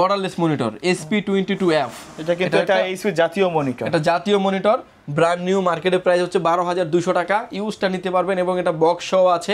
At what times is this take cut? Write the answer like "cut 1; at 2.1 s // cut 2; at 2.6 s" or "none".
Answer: none

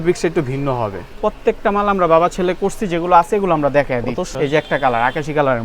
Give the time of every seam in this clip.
cut 1; at 1.0 s // cut 2; at 4.3 s

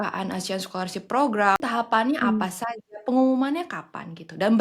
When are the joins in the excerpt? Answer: cut 1; at 1.6 s

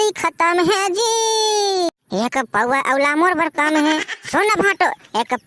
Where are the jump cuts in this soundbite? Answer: none

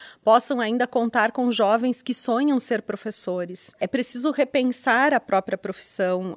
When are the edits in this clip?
cut 1; at 3.8 s

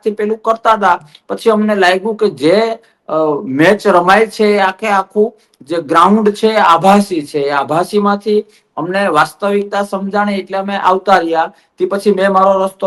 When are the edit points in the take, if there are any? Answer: none

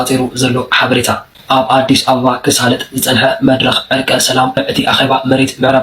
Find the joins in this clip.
cut 1; at 4.6 s

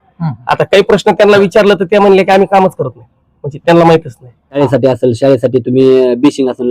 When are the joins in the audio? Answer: cut 1; at 4.6 s

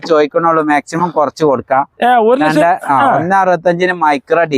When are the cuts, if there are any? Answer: none

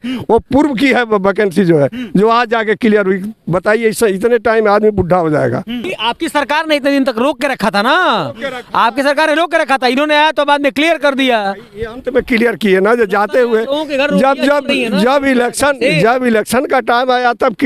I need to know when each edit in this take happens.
cut 1; at 5.9 s

